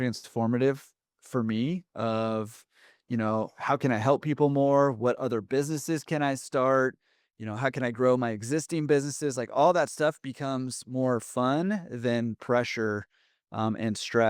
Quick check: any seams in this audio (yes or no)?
no